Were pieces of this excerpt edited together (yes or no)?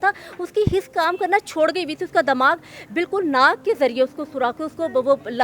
no